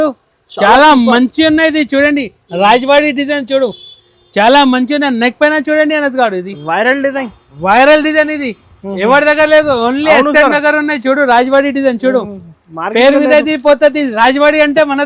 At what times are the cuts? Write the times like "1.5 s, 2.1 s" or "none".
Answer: none